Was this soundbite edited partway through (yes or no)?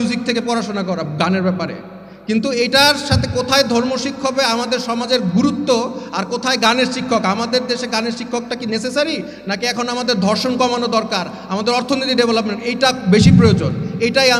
no